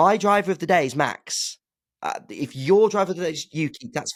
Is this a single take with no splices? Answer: yes; 0 cuts

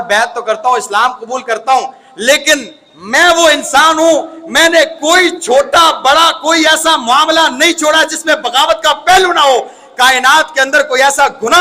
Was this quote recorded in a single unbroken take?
yes; 0 cuts

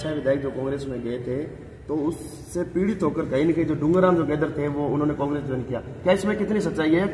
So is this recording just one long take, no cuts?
yes; 0 cuts

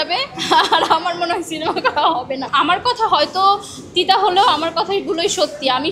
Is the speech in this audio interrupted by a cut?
yes; 1 cut; at 2.5 s

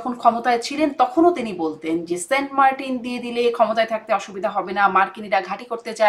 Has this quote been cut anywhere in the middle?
no; 0 cuts

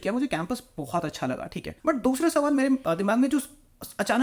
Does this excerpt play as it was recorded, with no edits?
yes; 0 cuts

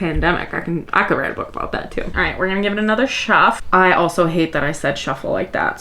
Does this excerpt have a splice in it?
yes; 2 cuts; at 2.1 s, 3.6 s

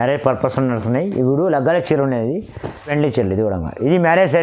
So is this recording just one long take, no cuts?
no; 1 cut; at 2.9 s

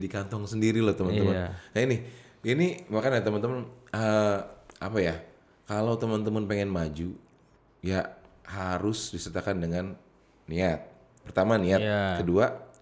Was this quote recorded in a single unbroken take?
yes; 0 cuts

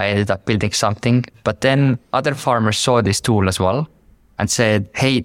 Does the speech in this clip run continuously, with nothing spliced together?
no; 1 cut; at 1.3 s

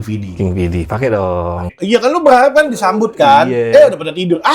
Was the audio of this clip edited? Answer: yes; 1 cut; at 1.7 s

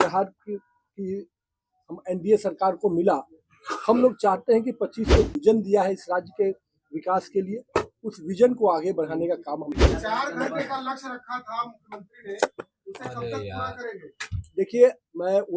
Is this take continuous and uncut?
no; 2 cuts; at 5.3 s, 9.7 s

